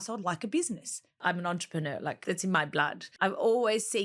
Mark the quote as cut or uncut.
cut